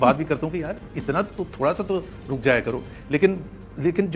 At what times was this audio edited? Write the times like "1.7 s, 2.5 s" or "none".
none